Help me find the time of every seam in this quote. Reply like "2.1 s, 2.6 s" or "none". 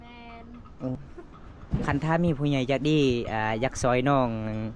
1.0 s